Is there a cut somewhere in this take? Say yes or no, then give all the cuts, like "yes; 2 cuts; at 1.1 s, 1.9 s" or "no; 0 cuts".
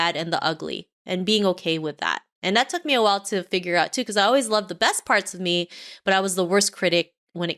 no; 0 cuts